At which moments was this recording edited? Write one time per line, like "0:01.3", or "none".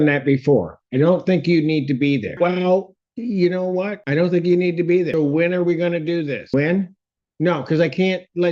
0:02.3
0:04.0
0:05.1
0:06.5

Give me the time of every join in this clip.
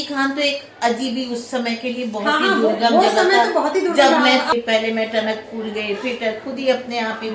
0:04.5

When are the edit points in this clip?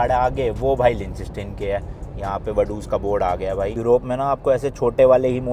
none

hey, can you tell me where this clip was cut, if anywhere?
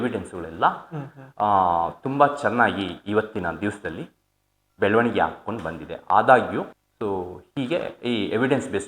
0:06.8

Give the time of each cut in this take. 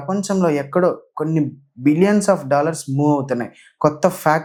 none

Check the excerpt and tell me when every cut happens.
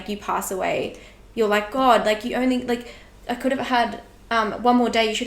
none

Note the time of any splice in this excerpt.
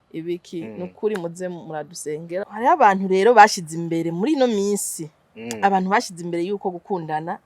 0:02.4

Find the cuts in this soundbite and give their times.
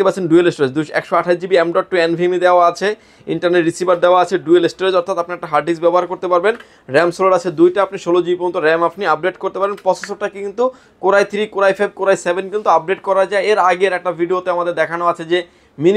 none

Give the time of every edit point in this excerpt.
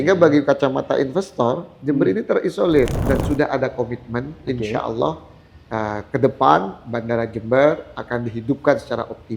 0:03.1

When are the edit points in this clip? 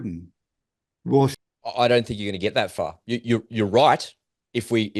0:01.4

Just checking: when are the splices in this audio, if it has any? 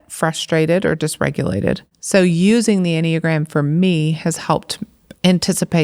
0:01.9

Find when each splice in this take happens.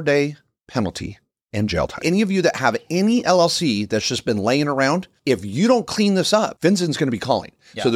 0:02.0
0:05.1
0:06.5

